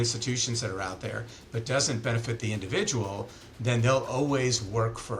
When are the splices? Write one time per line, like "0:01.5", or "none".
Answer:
none

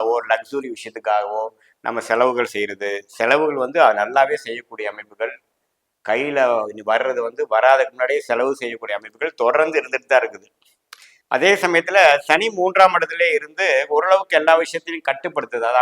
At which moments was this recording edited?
none

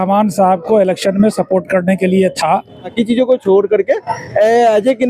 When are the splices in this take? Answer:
0:02.9

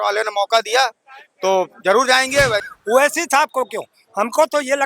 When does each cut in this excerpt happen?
0:02.6

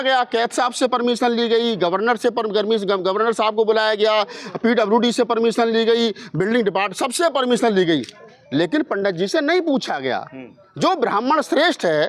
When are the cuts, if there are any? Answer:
none

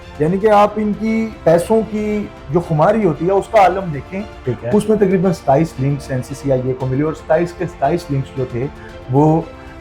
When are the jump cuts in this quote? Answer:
0:01.3
0:04.4

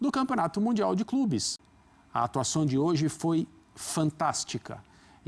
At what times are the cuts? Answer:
0:01.6

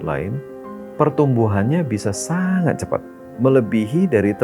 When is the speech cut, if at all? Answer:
0:03.2

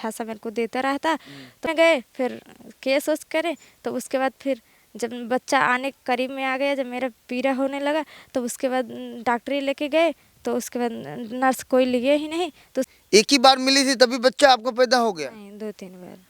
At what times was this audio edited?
0:01.7
0:13.0

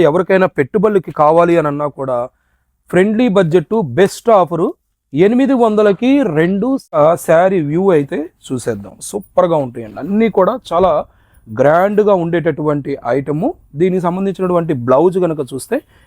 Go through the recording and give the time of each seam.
0:07.0

